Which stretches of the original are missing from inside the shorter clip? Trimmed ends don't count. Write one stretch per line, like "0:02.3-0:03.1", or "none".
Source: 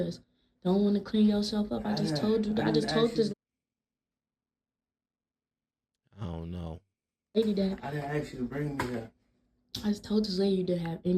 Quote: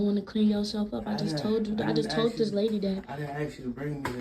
0:03.3-0:07.3